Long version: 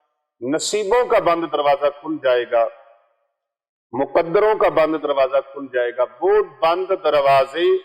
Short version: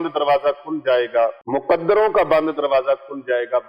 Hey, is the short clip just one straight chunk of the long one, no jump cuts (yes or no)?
no